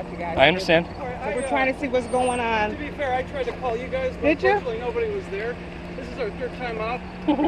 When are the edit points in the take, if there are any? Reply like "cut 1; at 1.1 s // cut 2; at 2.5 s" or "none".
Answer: none